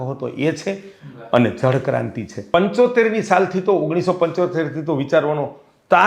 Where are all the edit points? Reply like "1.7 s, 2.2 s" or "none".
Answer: 2.5 s